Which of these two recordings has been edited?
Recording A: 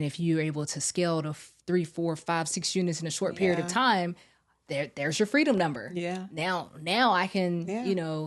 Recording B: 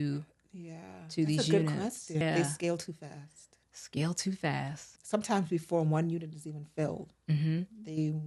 B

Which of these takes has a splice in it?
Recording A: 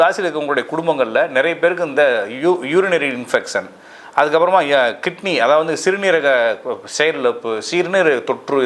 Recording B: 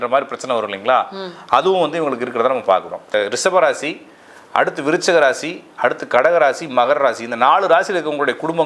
B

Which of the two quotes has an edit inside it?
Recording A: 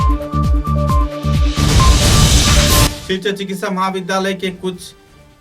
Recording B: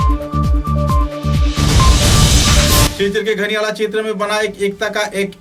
A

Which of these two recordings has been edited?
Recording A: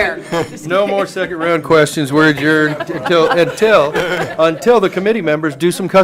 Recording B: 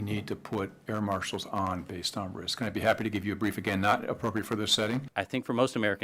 B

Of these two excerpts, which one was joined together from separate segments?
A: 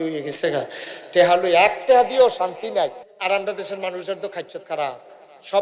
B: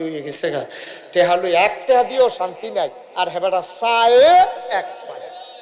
A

